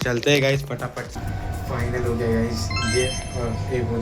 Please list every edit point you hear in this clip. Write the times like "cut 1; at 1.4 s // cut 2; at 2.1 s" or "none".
cut 1; at 1.1 s